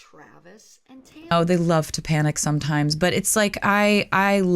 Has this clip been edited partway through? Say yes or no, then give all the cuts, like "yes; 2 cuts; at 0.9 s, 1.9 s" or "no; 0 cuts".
yes; 1 cut; at 1.3 s